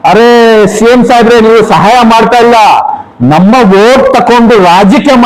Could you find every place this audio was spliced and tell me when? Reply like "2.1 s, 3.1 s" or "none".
none